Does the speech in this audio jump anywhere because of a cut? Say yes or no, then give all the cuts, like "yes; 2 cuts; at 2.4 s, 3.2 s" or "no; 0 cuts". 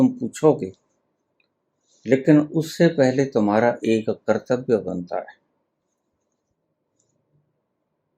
yes; 1 cut; at 6.5 s